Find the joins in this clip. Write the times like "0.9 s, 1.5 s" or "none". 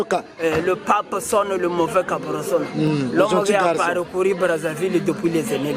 none